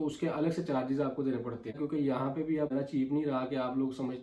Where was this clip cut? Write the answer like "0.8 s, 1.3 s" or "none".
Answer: 1.8 s, 2.7 s

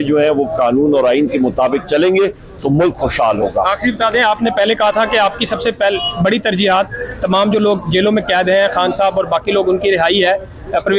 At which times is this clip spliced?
none

